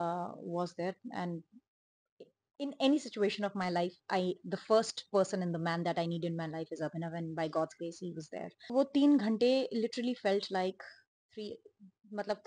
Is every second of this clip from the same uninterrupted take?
no; 1 cut; at 8.7 s

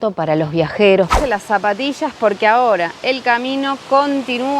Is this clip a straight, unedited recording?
no; 1 cut; at 1.1 s

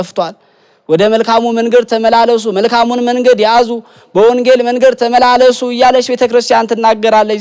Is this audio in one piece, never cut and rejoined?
yes; 0 cuts

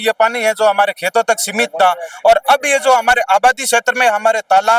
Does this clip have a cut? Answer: no; 0 cuts

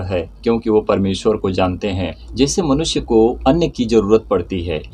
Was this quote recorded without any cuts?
no; 2 cuts; at 2.2 s, 3.4 s

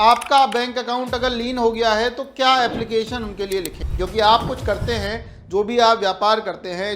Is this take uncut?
no; 1 cut; at 3.8 s

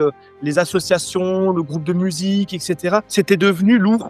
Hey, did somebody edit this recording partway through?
yes; 1 cut; at 3.1 s

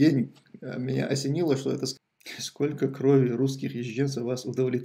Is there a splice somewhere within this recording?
yes; 1 cut; at 1.9 s

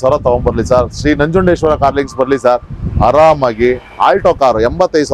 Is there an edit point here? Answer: no; 0 cuts

